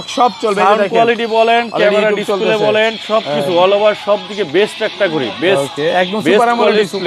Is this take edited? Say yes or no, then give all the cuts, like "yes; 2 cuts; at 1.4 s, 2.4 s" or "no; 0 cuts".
no; 0 cuts